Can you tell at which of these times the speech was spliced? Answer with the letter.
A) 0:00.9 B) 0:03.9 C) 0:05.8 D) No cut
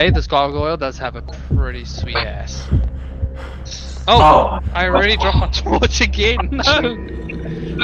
D